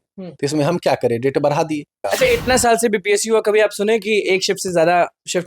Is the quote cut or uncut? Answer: cut